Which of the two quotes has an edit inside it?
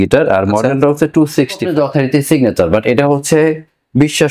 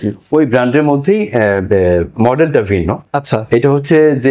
first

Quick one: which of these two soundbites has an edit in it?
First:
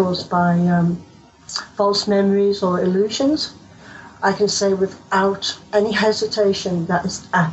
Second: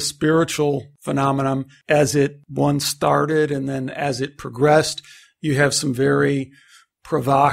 second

